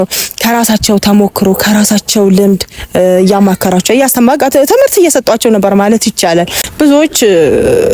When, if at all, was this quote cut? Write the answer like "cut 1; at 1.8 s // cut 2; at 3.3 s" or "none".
cut 1; at 6.6 s